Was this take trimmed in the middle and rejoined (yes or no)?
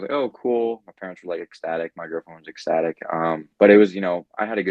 no